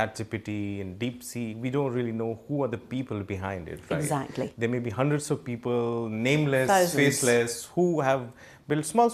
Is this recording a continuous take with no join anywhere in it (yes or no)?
yes